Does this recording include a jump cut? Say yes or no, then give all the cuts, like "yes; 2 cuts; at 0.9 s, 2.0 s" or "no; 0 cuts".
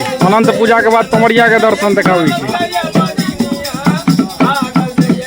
no; 0 cuts